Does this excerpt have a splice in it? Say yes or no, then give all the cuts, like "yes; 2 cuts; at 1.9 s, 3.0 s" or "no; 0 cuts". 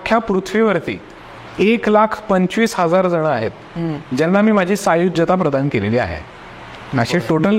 no; 0 cuts